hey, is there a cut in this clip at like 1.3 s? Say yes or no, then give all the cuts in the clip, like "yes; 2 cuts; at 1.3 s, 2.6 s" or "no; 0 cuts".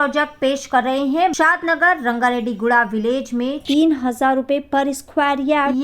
yes; 1 cut; at 1.3 s